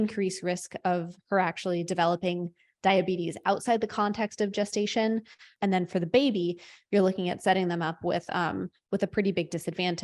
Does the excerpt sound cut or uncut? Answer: cut